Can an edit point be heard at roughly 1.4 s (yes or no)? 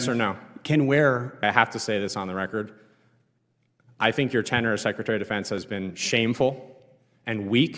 yes